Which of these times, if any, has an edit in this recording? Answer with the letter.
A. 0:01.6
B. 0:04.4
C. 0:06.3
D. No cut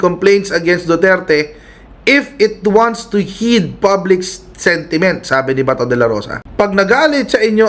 C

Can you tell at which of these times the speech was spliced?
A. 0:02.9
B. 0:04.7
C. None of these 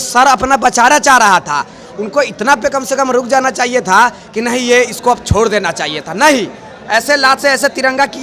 C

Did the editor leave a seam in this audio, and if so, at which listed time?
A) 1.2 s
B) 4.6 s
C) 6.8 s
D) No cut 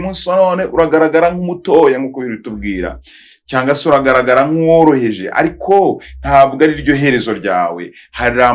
D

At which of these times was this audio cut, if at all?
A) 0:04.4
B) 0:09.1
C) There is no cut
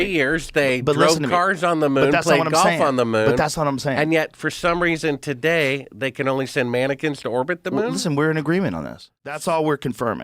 B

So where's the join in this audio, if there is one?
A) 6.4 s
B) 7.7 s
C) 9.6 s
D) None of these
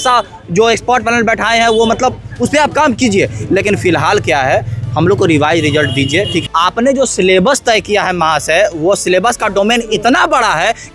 A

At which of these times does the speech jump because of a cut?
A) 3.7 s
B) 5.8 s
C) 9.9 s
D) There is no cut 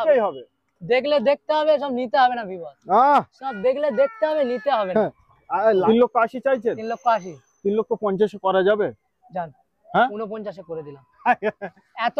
B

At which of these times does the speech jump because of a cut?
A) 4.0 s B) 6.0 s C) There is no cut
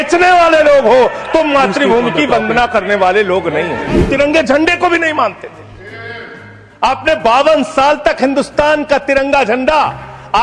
A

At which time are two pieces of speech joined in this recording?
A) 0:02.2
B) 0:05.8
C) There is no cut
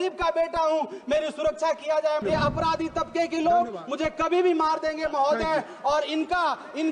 A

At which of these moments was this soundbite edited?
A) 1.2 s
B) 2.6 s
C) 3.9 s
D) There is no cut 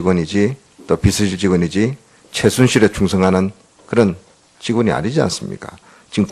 C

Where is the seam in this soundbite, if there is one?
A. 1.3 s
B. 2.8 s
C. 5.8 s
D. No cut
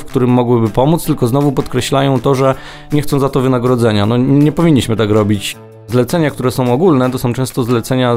C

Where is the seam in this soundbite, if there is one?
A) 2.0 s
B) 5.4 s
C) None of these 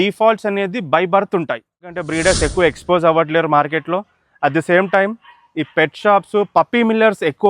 A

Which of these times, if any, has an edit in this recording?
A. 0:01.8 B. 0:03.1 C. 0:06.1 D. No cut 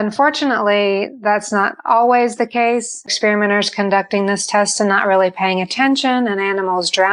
B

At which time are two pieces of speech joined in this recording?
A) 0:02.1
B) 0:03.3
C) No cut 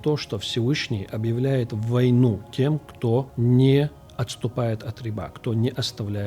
B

